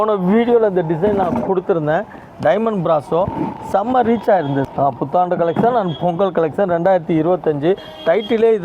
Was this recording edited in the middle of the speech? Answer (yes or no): yes